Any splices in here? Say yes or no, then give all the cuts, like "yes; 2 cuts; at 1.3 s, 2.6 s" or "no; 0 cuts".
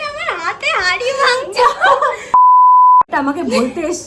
yes; 2 cuts; at 2.2 s, 3.1 s